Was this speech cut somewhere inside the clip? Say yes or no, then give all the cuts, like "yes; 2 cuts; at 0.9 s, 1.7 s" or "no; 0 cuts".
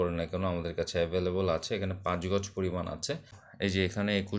yes; 1 cut; at 3.4 s